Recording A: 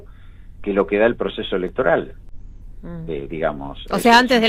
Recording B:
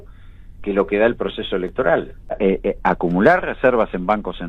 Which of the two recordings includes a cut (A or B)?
B